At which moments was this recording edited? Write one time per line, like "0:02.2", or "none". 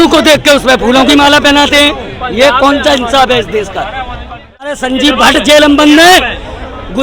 0:04.8